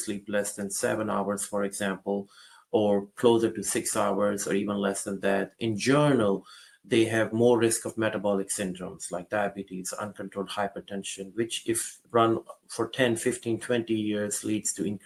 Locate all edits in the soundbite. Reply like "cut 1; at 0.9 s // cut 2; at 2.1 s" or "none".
none